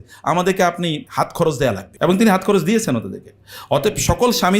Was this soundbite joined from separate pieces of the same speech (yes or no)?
yes